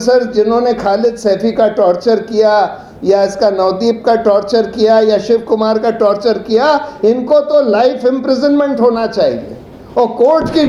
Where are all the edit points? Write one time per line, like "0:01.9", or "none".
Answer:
none